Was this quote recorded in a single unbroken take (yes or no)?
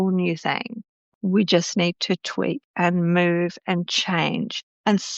no